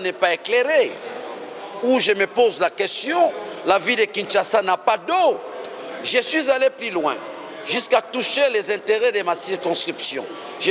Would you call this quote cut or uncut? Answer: uncut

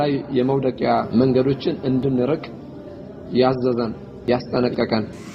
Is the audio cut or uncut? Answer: cut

